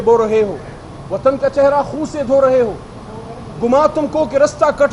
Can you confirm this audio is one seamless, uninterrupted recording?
yes; 0 cuts

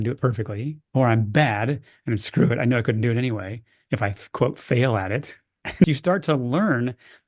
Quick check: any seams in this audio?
yes; 1 cut; at 5.8 s

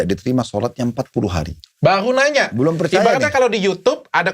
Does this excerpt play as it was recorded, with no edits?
no; 1 cut; at 1.7 s

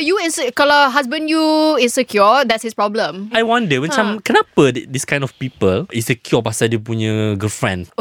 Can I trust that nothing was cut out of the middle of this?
no; 2 cuts; at 3.3 s, 5.9 s

